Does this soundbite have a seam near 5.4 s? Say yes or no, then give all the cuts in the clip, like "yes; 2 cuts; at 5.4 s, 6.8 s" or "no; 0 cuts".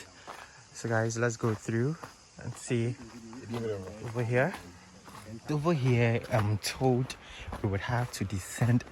yes; 1 cut; at 5.4 s